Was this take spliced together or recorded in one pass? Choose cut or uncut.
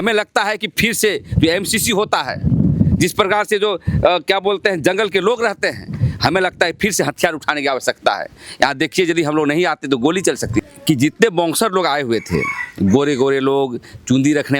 cut